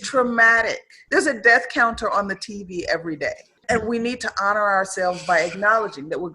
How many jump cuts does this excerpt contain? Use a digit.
1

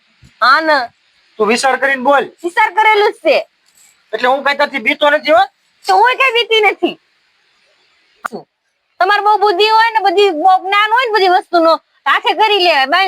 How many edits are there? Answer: 1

